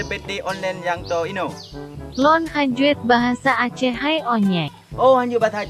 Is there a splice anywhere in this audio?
no; 0 cuts

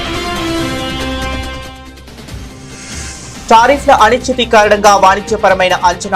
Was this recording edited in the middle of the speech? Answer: no; 0 cuts

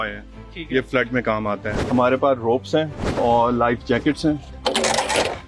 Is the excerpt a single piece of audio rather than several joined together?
no; 3 cuts; at 1.7 s, 3.1 s, 4.5 s

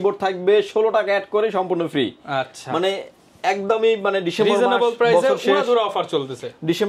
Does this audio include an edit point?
no; 0 cuts

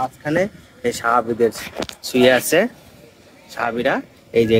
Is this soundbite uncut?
yes; 0 cuts

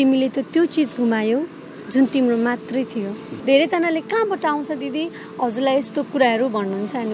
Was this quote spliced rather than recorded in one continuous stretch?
yes; 1 cut; at 3.3 s

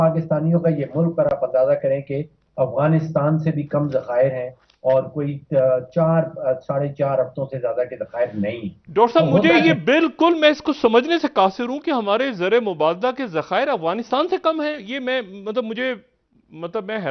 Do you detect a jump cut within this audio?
no; 0 cuts

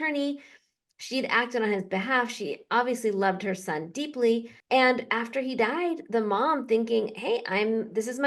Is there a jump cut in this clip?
yes; 1 cut; at 4.5 s

